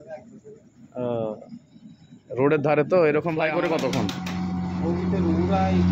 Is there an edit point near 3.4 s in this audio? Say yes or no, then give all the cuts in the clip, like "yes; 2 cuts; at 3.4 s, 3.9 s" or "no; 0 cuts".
yes; 1 cut; at 3.4 s